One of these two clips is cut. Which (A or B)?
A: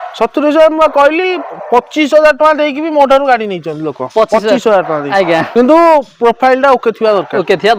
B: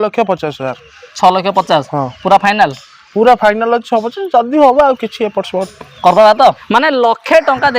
B